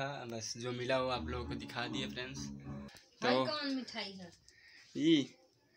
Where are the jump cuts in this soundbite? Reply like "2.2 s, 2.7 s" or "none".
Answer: 2.9 s